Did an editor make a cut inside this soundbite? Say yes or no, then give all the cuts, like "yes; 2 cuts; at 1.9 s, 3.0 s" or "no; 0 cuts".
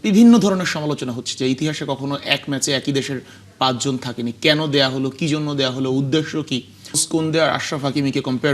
yes; 1 cut; at 7.0 s